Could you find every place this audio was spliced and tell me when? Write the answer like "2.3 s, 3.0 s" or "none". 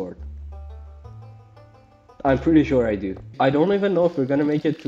3.3 s